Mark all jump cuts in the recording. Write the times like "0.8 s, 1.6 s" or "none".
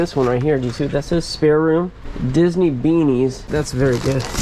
3.5 s